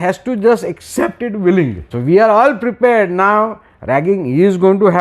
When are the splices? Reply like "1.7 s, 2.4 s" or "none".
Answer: 1.9 s